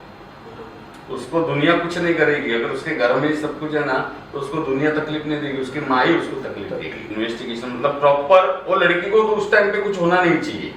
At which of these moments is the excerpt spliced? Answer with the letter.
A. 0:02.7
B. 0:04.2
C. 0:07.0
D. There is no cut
C